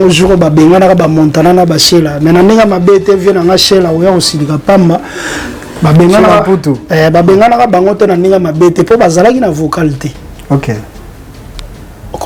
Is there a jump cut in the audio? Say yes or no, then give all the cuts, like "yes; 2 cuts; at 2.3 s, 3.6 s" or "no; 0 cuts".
no; 0 cuts